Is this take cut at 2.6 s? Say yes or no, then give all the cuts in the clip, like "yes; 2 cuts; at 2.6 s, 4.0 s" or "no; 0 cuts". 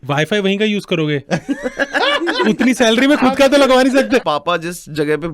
no; 1 cut; at 4.2 s